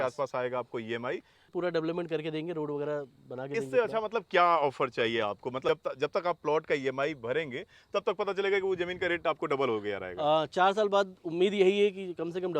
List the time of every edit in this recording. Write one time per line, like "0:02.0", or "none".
0:01.5
0:05.7